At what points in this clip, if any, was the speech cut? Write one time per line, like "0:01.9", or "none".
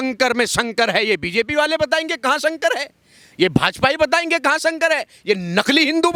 none